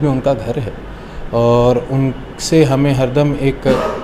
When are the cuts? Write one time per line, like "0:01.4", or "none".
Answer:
none